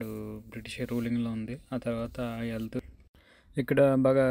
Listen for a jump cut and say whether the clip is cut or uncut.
cut